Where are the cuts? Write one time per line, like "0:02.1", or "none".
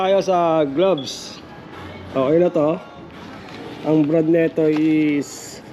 none